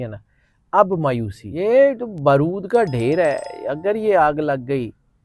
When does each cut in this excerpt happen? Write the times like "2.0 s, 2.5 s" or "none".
1.4 s